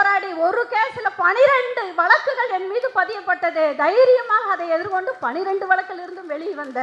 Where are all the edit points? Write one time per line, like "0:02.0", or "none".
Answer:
none